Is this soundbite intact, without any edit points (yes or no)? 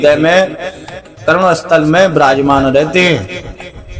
yes